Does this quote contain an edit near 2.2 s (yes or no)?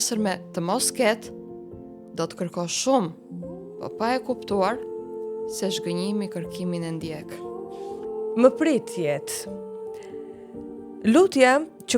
no